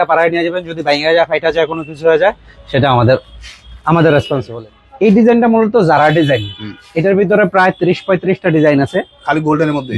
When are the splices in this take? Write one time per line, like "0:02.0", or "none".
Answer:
0:04.5